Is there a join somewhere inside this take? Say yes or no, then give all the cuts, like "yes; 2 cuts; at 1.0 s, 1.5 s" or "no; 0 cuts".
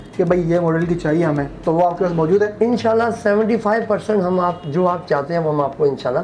no; 0 cuts